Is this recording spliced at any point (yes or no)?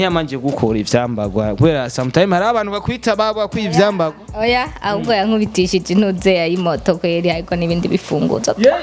no